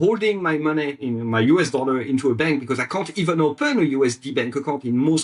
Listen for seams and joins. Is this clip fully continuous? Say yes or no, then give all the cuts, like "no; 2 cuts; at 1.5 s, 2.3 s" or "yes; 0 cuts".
yes; 0 cuts